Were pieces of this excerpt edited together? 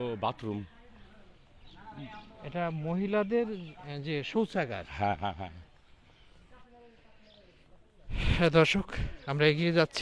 no; 0 cuts

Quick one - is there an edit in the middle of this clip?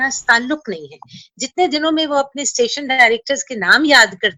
no; 0 cuts

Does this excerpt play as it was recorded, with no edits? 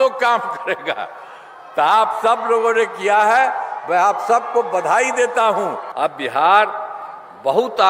no; 1 cut; at 5.8 s

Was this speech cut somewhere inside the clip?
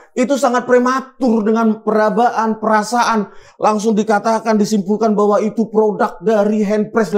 no; 0 cuts

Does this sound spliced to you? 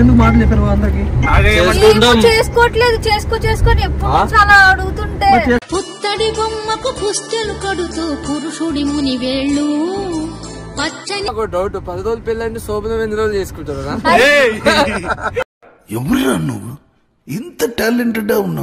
yes; 1 cut; at 11.3 s

